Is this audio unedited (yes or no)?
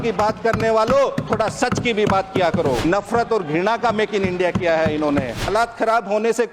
no